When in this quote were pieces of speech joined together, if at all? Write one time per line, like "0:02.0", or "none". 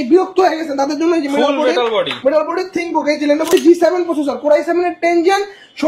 0:03.5

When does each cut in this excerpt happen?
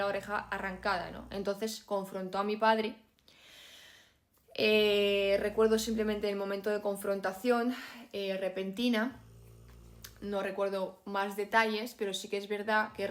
none

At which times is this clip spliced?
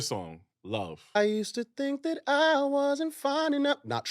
0:01.2

